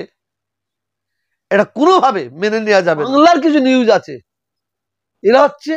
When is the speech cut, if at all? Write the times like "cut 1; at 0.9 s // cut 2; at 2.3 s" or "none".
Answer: cut 1; at 3.1 s